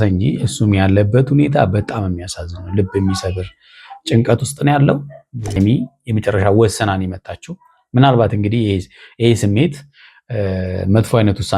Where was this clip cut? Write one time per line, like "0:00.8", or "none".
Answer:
0:05.6